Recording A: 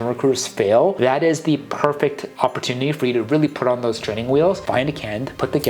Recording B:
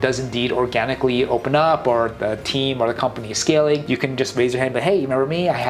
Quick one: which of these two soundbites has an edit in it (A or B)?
A